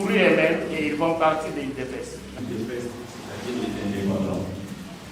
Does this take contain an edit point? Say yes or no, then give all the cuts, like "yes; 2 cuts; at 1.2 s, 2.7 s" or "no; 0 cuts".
yes; 1 cut; at 2.4 s